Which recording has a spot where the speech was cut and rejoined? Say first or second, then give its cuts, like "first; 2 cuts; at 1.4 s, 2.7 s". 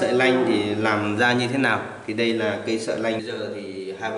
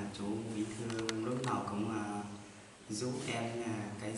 first; 1 cut; at 3.2 s